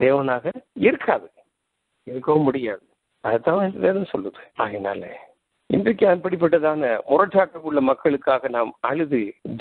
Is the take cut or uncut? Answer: cut